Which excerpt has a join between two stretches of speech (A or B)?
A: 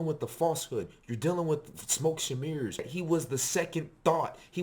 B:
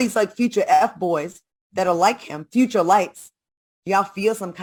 A